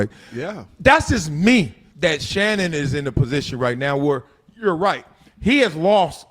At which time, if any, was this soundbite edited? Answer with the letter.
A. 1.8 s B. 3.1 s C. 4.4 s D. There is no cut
A